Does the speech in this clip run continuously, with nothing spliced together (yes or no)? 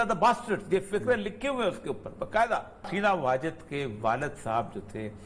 no